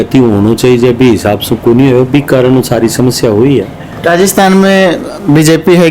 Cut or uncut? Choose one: cut